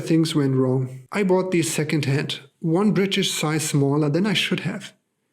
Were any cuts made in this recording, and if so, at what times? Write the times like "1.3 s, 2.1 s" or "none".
1.0 s